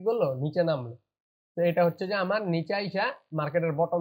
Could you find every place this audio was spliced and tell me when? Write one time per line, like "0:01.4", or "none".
none